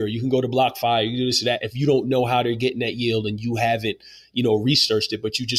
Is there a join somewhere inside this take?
no; 0 cuts

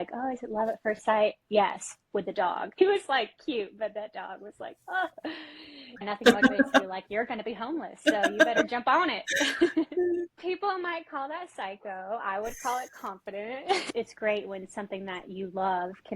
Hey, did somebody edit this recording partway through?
yes; 4 cuts; at 2.8 s, 6.1 s, 10.4 s, 13.8 s

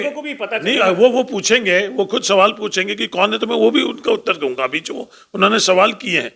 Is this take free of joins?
yes; 0 cuts

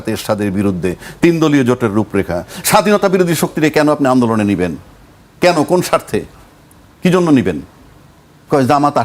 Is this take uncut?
yes; 0 cuts

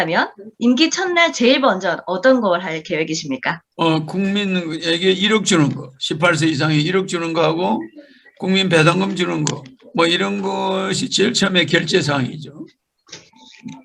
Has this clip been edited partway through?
no; 0 cuts

